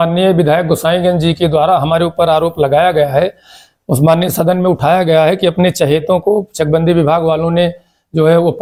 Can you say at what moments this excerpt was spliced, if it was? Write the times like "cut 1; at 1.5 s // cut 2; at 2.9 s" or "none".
none